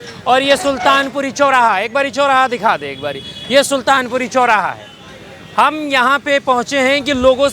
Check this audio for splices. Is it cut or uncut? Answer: uncut